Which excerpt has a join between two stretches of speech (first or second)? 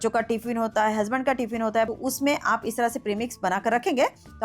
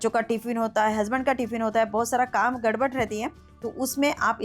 first